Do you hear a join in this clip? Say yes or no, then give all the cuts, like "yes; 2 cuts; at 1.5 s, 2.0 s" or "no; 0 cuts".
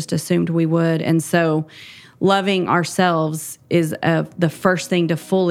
no; 0 cuts